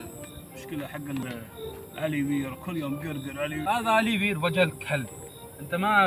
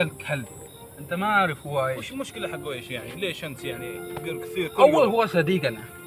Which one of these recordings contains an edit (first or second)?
first